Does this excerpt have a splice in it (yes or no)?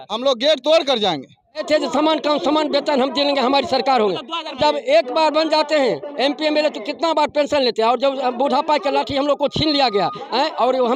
yes